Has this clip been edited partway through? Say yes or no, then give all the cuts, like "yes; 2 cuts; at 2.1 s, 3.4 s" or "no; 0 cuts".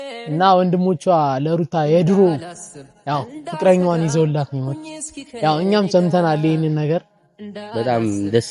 no; 0 cuts